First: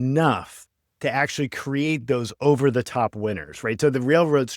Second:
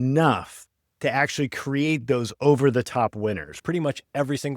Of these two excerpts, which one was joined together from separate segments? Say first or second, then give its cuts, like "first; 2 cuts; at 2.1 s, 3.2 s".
second; 1 cut; at 3.5 s